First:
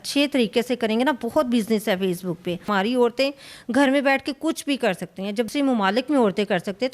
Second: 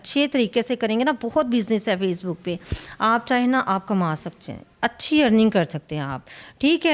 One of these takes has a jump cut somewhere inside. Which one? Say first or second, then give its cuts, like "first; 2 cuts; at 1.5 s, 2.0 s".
first; 2 cuts; at 2.7 s, 5.5 s